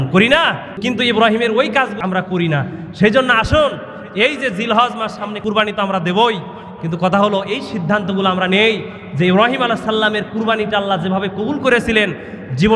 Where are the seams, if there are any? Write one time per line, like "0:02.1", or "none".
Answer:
0:00.8
0:02.0
0:05.4